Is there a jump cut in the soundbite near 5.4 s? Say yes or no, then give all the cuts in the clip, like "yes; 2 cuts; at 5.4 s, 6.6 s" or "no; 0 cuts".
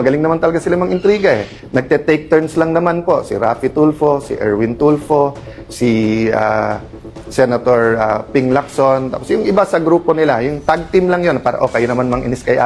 no; 1 cut; at 1.6 s